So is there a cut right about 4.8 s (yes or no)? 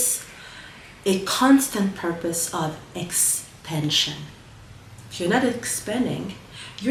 no